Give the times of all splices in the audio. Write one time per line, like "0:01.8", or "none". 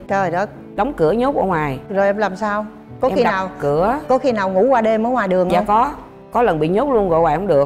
none